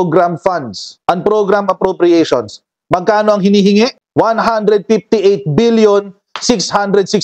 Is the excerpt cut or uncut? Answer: cut